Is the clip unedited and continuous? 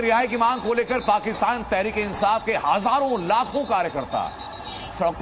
yes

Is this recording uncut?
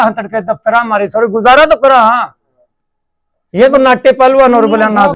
yes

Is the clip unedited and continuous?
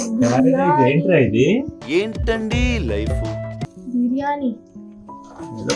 yes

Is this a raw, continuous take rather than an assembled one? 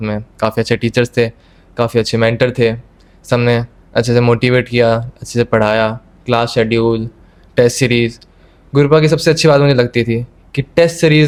yes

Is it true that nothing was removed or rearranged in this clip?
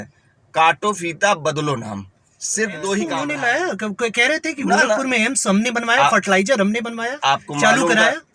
no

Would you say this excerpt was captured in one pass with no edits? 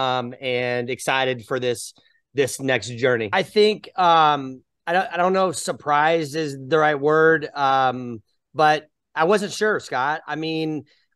no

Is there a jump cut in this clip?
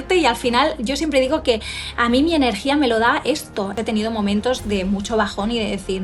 yes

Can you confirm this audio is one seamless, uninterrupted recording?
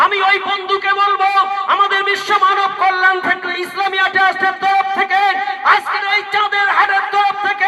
yes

